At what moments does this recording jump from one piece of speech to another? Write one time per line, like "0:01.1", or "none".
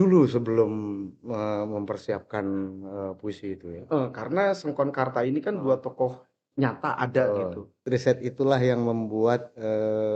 0:07.8